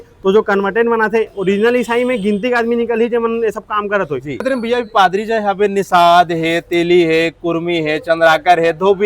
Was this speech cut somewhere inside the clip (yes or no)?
yes